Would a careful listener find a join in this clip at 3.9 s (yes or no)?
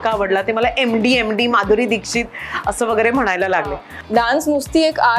yes